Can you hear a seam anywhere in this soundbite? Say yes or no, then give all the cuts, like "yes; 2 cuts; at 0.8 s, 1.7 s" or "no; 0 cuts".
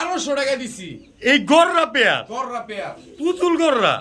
no; 0 cuts